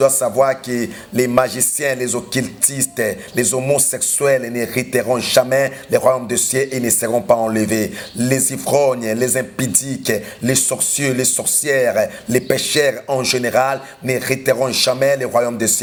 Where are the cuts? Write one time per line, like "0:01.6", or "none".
none